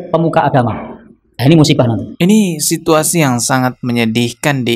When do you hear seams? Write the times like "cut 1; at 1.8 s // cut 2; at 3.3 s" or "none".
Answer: cut 1; at 2.1 s